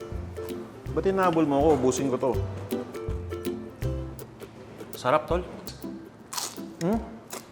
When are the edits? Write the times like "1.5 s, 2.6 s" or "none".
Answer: 5.7 s